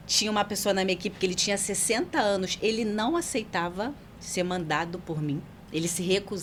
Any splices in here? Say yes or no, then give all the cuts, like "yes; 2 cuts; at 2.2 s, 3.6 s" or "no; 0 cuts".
no; 0 cuts